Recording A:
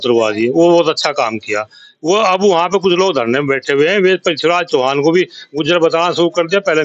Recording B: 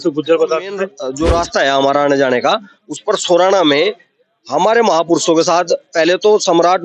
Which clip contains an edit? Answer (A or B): B